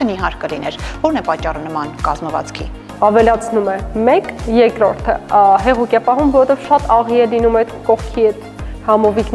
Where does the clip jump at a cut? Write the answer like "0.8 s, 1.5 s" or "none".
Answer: 2.8 s